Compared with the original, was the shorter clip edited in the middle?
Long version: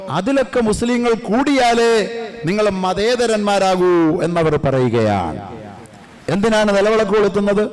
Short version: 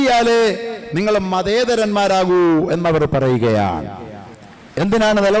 no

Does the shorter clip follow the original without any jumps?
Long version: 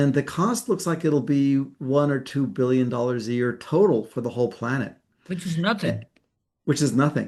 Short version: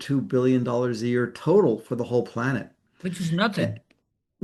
yes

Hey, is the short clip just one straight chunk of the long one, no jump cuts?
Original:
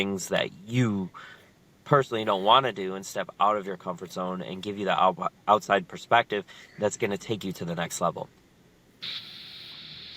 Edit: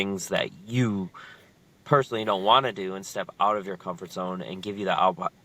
yes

